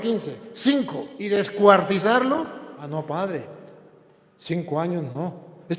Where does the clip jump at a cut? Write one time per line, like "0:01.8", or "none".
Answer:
0:01.2
0:02.8